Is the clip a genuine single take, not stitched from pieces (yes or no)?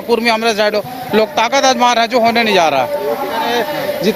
yes